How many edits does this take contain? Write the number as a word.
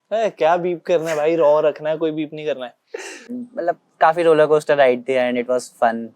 one